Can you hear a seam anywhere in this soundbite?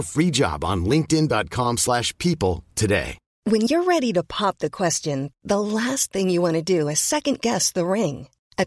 yes; 1 cut; at 3.2 s

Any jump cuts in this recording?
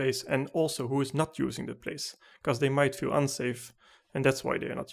no; 0 cuts

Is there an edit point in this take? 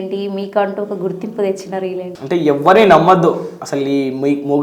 yes; 1 cut; at 2.1 s

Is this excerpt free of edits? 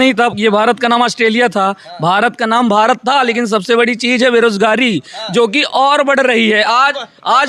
yes; 0 cuts

